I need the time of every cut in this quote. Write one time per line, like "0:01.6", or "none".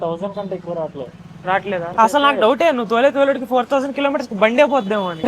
0:01.9